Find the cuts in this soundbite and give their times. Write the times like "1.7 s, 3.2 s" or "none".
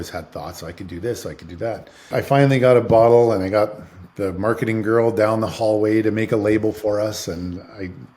2.1 s